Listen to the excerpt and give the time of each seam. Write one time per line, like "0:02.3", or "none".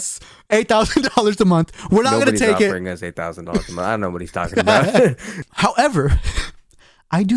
0:05.4